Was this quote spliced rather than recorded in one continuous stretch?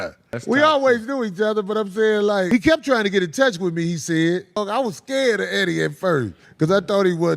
no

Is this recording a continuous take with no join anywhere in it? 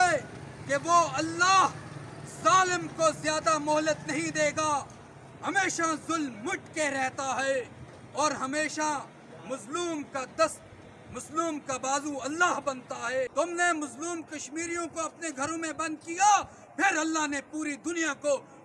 no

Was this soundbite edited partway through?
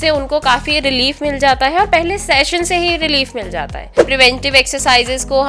yes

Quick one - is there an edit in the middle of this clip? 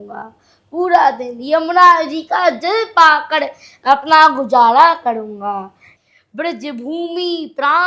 yes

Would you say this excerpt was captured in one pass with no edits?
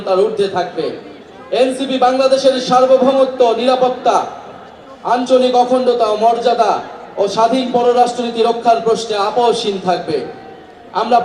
yes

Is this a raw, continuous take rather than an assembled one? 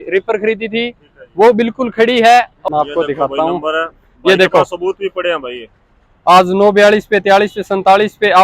no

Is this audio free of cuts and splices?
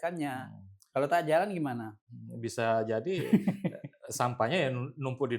yes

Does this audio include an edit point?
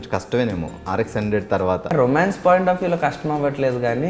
yes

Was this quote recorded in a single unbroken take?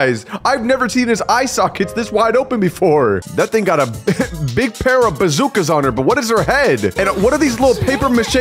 no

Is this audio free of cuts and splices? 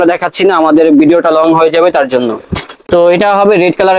no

